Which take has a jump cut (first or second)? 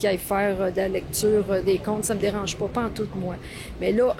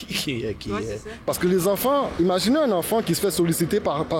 second